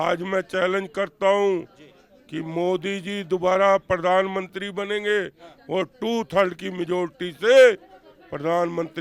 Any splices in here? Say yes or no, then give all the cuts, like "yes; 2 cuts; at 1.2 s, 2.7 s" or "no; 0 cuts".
no; 0 cuts